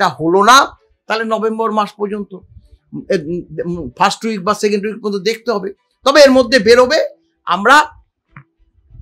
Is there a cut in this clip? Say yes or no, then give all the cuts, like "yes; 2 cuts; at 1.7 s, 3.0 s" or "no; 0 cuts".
no; 0 cuts